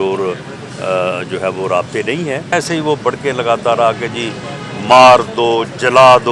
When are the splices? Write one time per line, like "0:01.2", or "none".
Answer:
0:02.5